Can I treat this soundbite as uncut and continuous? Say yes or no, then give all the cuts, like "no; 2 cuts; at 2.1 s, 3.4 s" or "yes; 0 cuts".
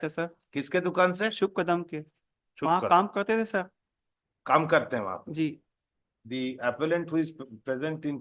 yes; 0 cuts